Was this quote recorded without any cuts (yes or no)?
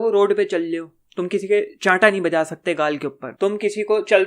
no